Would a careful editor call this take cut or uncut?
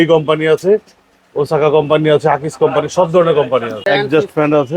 cut